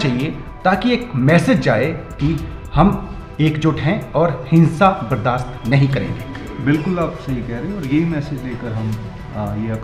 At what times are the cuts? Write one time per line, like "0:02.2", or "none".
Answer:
none